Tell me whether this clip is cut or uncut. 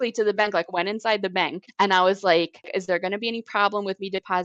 cut